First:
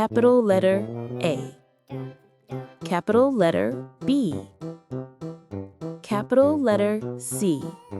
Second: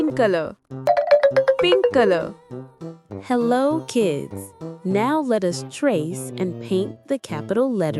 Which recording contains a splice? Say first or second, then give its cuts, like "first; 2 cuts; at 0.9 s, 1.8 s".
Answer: first; 4 cuts; at 1.4 s, 2.9 s, 4.3 s, 6.0 s